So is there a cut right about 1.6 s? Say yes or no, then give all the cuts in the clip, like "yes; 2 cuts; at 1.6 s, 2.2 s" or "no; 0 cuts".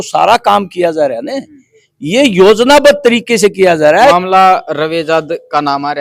no; 1 cut; at 4.1 s